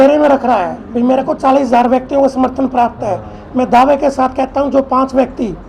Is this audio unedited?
yes; 0 cuts

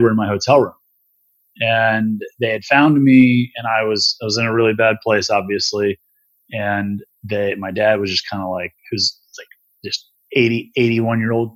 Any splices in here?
no; 0 cuts

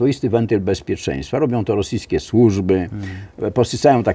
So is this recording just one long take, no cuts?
yes; 0 cuts

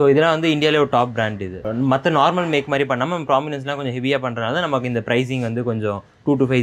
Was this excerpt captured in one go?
yes; 0 cuts

